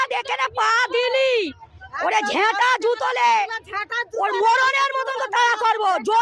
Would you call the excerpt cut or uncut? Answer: uncut